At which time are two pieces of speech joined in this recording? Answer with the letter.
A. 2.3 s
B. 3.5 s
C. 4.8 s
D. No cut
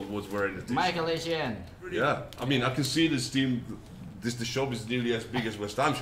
A